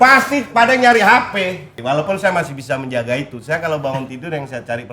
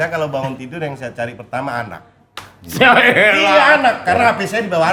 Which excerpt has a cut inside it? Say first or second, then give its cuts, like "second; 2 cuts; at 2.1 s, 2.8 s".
first; 1 cut; at 1.7 s